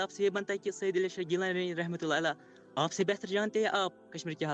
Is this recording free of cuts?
yes; 0 cuts

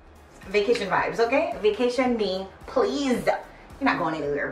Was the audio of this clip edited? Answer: no; 0 cuts

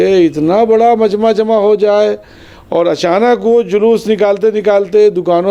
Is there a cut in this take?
no; 0 cuts

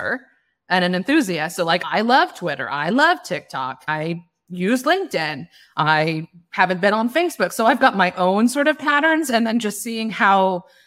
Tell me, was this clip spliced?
yes; 1 cut; at 1.8 s

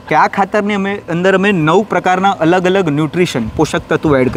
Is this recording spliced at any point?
no; 0 cuts

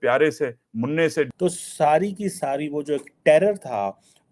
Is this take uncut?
no; 1 cut; at 1.3 s

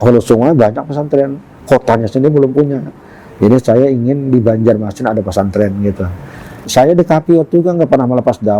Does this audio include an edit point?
yes; 1 cut; at 6.6 s

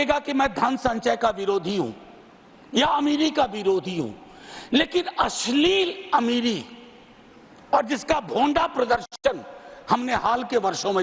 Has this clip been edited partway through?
no; 0 cuts

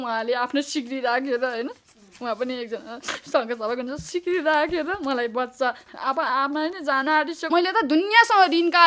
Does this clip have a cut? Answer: yes; 1 cut; at 7.5 s

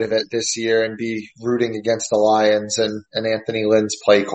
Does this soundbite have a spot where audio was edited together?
no; 0 cuts

